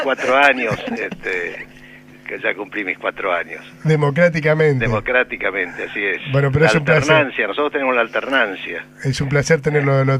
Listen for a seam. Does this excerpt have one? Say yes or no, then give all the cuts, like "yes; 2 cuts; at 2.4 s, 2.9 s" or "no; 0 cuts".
yes; 1 cut; at 7.7 s